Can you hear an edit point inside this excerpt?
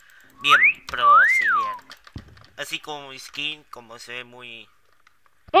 no; 0 cuts

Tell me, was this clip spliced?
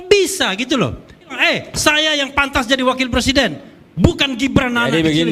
yes; 1 cut; at 1.4 s

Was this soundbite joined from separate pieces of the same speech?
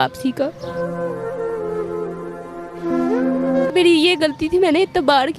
yes; 1 cut; at 3.7 s

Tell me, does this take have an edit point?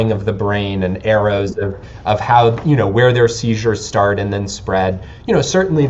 no; 0 cuts

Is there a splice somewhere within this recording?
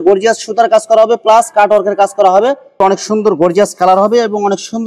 yes; 1 cut; at 2.8 s

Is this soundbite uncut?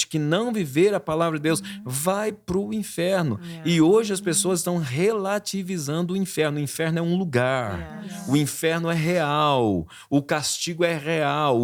yes; 0 cuts

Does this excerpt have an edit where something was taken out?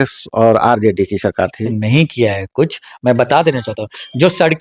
yes; 1 cut; at 1.7 s

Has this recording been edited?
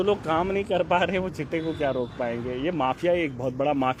no; 0 cuts

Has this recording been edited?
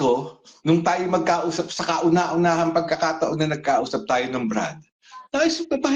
no; 0 cuts

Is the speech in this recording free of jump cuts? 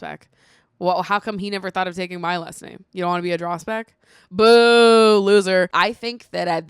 no; 1 cut; at 5.7 s

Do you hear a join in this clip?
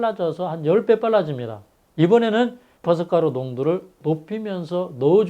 yes; 1 cut; at 2.8 s

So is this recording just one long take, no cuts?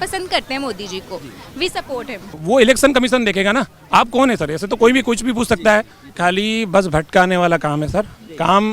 no; 2 cuts; at 2.4 s, 6.0 s

